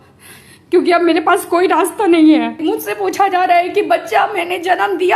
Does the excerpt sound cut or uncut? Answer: cut